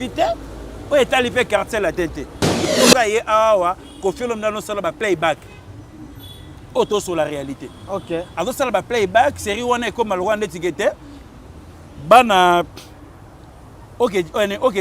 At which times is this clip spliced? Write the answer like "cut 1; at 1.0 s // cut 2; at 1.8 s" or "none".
cut 1; at 2.7 s